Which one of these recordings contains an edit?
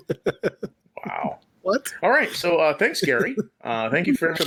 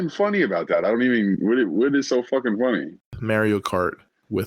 second; 1 cut; at 3.1 s

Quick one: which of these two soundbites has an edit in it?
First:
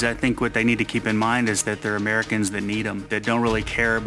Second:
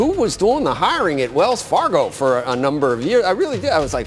first; 1 cut; at 3.0 s

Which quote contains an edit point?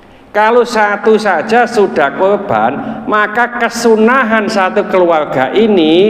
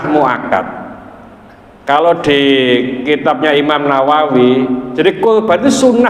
second; 1 cut; at 4.9 s

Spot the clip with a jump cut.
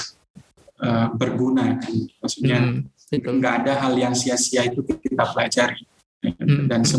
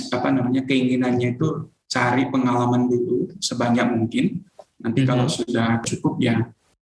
second; 1 cut; at 5.8 s

